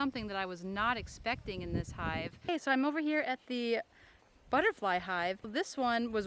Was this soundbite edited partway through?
yes; 2 cuts; at 2.3 s, 5.5 s

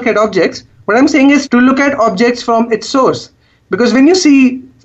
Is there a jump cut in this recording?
yes; 1 cut; at 1.4 s

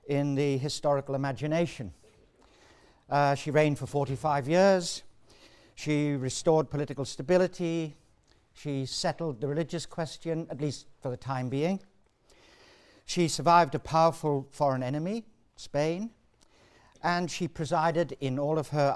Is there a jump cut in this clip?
no; 0 cuts

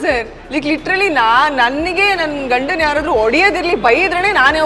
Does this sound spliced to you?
no; 0 cuts

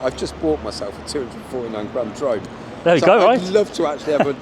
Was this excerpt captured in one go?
yes; 0 cuts

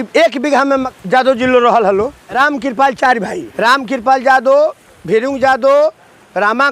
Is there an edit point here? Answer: yes; 3 cuts; at 0.9 s, 2.2 s, 3.4 s

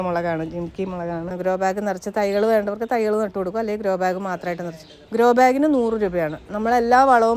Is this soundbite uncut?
no; 1 cut; at 1.3 s

